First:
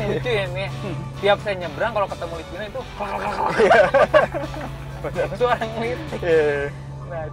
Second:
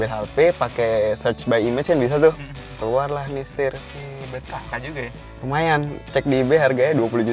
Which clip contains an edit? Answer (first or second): second